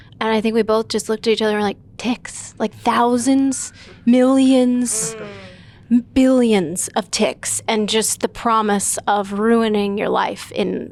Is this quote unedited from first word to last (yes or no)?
yes